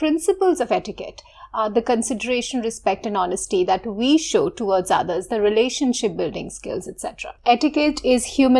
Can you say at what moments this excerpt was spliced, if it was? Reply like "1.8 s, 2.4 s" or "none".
7.3 s

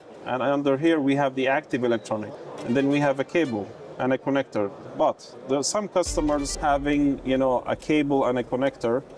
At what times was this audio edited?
2.3 s, 4.8 s, 6.5 s

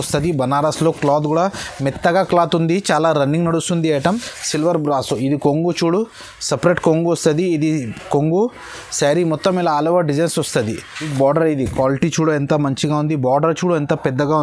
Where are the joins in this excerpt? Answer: 4.0 s, 11.0 s

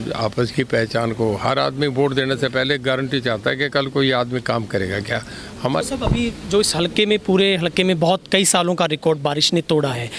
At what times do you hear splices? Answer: 5.8 s

